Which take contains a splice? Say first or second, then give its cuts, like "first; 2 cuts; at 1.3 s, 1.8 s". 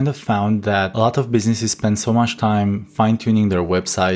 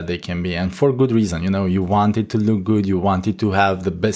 first; 1 cut; at 0.9 s